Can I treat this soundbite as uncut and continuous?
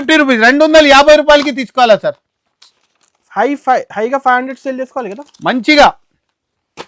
yes; 0 cuts

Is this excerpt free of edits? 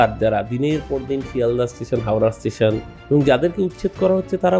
no; 1 cut; at 2.9 s

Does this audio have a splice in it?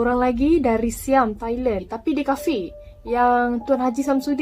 yes; 1 cut; at 1.9 s

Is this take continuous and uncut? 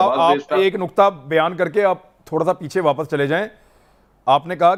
yes; 0 cuts

